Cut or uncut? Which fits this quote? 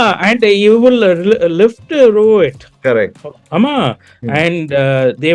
cut